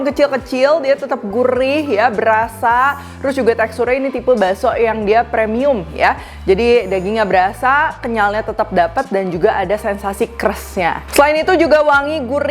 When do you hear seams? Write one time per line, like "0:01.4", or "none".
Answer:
none